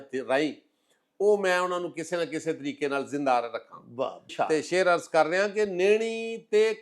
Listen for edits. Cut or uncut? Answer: uncut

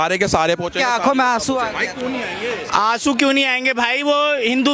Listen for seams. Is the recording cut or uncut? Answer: uncut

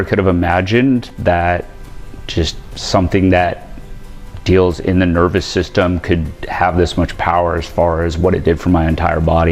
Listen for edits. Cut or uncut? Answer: uncut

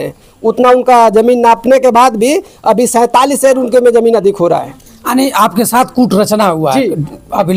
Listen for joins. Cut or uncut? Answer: uncut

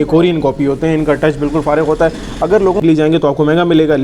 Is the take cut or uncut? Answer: cut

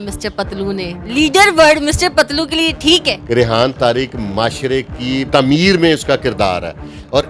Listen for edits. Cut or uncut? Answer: cut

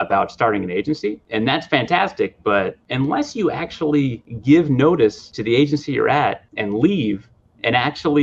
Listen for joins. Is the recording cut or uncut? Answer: cut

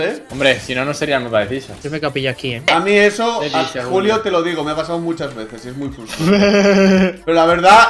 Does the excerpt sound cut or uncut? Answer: uncut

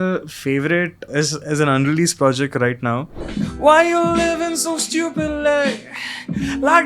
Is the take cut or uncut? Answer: cut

